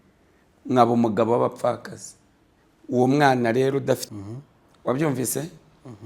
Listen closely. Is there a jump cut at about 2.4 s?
no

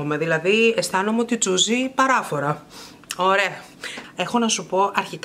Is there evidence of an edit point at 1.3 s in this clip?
no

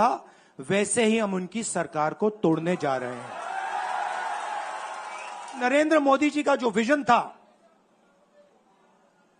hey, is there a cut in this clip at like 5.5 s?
yes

